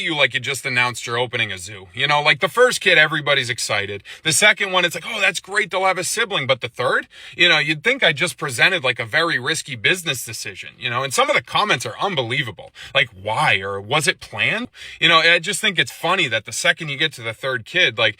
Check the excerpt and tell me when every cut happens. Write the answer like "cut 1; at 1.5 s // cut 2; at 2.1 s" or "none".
cut 1; at 14.6 s